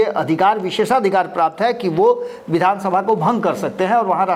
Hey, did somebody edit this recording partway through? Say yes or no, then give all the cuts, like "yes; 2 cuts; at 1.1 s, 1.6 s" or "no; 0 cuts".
no; 0 cuts